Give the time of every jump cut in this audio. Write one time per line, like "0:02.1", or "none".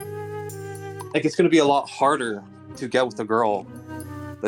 none